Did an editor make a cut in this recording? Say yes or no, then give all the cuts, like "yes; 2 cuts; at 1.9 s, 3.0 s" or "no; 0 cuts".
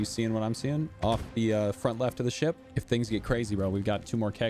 yes; 1 cut; at 2.7 s